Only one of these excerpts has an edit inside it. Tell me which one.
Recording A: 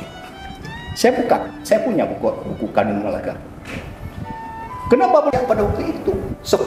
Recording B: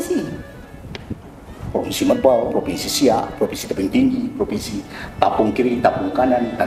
A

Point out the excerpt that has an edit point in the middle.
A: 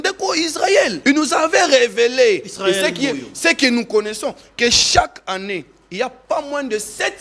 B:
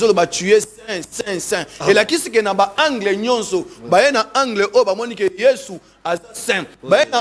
A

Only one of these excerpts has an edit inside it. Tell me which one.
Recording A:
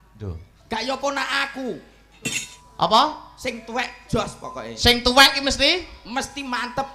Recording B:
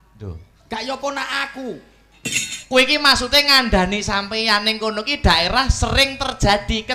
A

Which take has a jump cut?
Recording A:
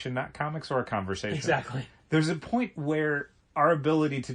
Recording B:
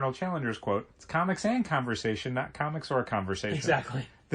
B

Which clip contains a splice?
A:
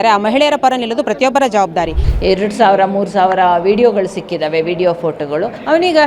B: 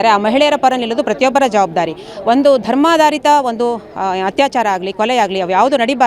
A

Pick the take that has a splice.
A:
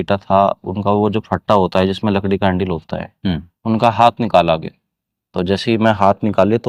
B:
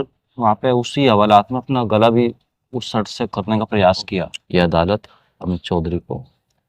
B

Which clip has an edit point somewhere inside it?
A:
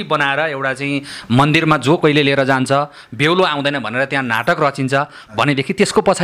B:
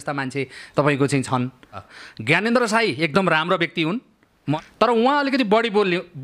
B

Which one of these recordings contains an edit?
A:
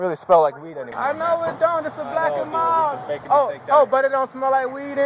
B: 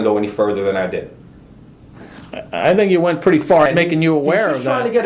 B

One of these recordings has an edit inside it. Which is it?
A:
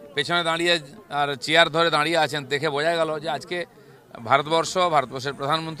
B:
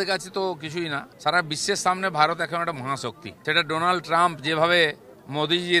B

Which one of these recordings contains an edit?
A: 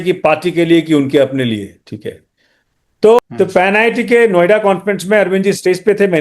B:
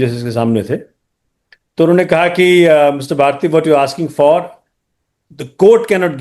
A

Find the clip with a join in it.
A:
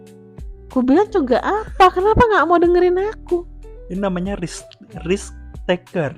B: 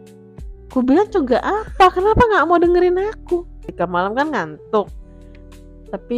B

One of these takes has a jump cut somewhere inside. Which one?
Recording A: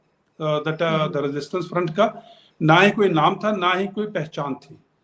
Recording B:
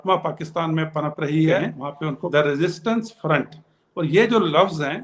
B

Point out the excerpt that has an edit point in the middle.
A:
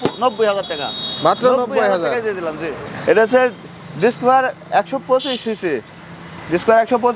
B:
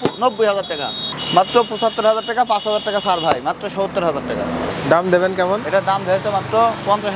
B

